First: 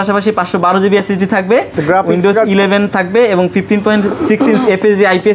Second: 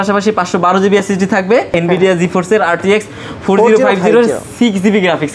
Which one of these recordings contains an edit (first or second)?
second